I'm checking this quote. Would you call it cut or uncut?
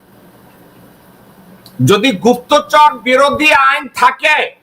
cut